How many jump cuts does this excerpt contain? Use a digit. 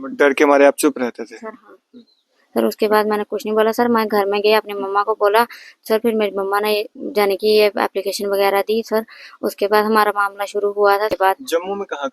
1